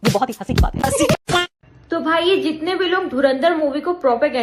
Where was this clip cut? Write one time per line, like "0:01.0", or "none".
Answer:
0:01.1